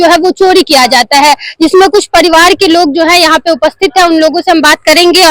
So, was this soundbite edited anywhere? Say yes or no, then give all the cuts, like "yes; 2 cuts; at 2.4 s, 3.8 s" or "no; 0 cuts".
no; 0 cuts